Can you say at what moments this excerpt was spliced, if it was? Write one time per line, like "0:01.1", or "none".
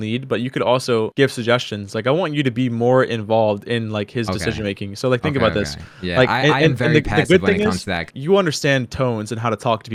none